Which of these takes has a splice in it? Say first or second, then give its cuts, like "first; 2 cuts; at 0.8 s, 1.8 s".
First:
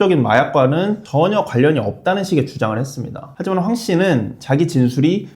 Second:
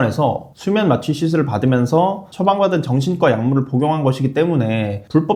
first; 1 cut; at 3.2 s